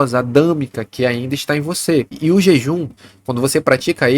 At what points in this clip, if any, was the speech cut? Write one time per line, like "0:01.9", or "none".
0:02.1